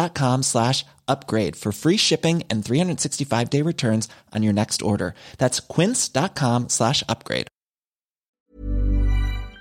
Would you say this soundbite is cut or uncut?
cut